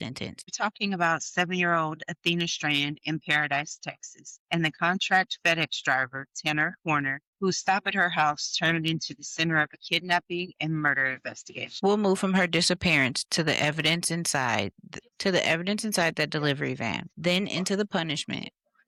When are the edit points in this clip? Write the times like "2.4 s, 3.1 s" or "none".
none